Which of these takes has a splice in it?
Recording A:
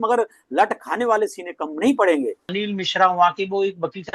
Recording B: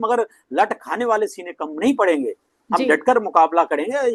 A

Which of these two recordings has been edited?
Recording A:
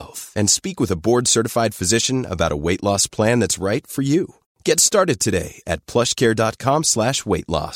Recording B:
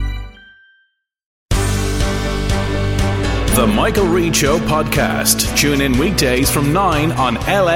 B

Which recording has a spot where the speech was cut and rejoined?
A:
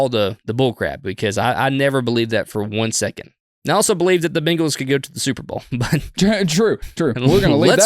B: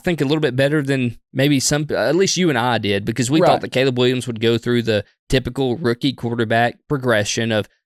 A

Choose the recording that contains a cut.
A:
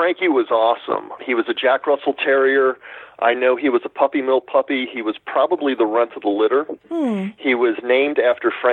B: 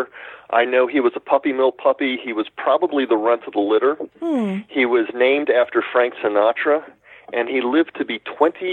A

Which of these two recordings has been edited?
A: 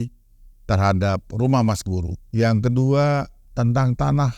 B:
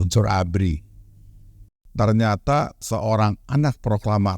B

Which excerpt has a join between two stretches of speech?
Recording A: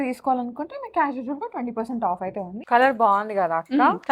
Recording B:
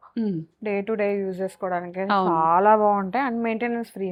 A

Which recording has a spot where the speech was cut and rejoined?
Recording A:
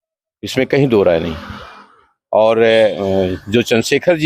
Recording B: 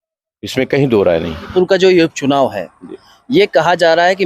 B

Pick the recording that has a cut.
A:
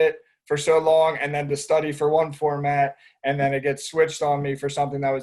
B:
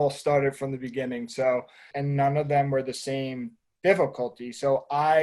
B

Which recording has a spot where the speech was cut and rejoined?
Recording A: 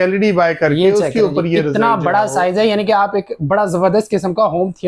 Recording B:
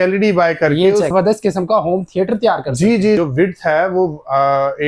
B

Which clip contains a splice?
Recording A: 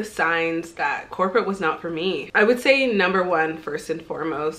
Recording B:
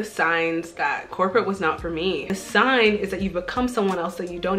B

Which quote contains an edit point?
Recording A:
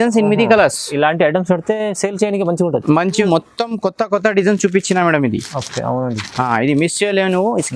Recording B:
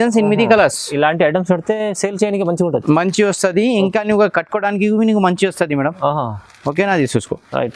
A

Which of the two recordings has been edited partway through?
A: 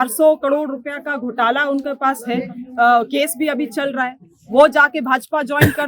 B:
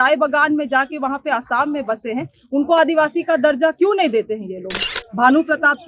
B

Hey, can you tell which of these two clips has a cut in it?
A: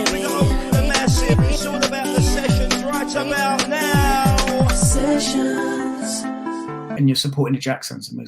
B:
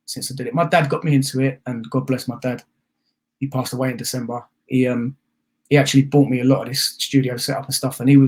A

